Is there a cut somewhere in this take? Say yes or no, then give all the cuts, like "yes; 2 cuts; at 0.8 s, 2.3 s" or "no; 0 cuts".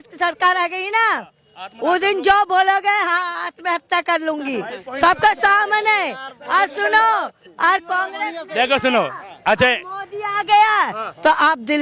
no; 0 cuts